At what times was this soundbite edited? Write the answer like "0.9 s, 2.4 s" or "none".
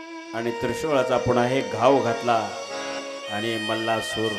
none